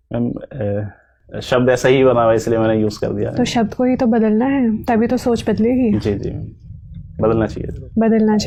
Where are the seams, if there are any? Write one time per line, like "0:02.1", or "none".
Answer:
none